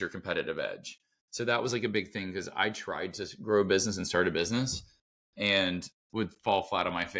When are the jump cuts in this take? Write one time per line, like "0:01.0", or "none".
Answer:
none

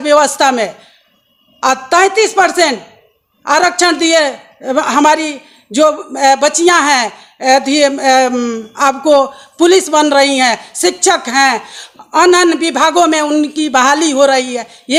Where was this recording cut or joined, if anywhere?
none

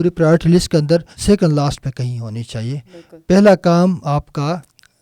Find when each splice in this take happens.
0:01.1

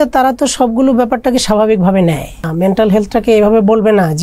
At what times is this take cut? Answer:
0:02.5

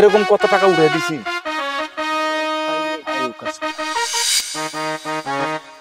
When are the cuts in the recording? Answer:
0:04.2

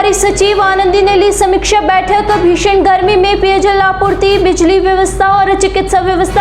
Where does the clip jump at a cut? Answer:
none

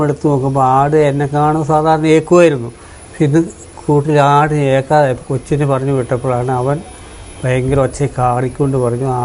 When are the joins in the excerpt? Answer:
none

